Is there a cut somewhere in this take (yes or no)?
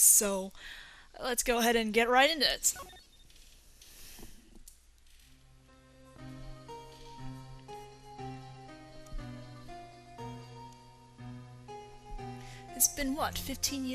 no